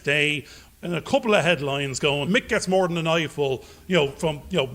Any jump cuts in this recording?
yes; 1 cut; at 2.3 s

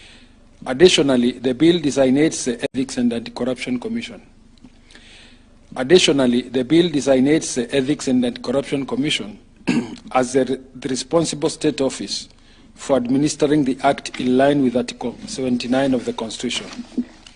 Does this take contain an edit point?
yes; 1 cut; at 2.7 s

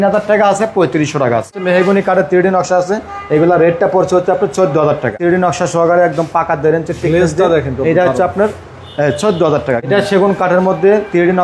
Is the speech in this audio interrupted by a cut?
yes; 3 cuts; at 1.6 s, 5.2 s, 9.8 s

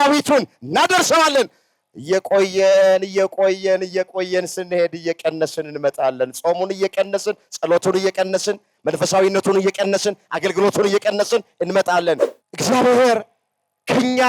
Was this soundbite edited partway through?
yes; 1 cut; at 12.4 s

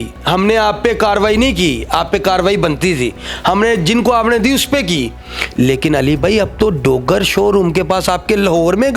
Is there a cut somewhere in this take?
no; 0 cuts

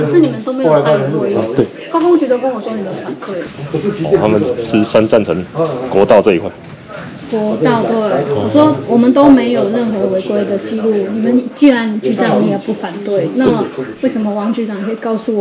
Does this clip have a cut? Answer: yes; 1 cut; at 3.5 s

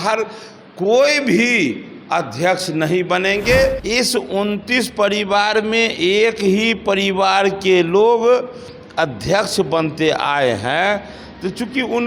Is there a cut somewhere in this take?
yes; 1 cut; at 3.8 s

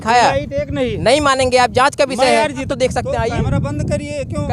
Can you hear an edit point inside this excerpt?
yes; 1 cut; at 2.7 s

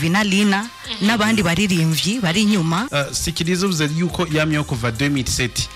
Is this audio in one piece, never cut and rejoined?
no; 1 cut; at 2.9 s

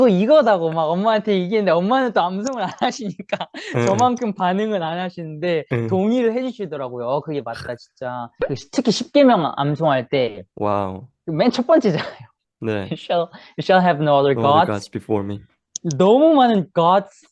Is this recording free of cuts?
no; 1 cut; at 8.3 s

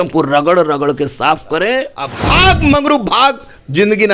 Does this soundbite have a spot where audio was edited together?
yes; 1 cut; at 2.1 s

